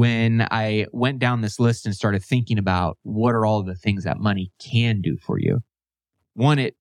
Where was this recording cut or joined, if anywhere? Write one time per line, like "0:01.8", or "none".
none